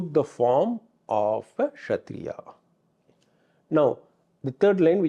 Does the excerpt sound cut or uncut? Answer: uncut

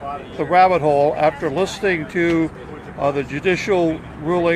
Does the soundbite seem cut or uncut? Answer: cut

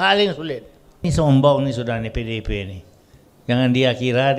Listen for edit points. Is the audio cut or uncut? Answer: cut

